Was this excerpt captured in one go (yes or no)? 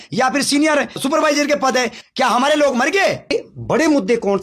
no